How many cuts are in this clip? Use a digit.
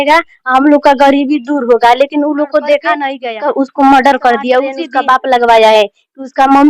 2